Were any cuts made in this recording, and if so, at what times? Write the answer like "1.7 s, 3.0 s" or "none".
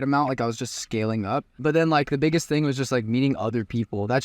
1.5 s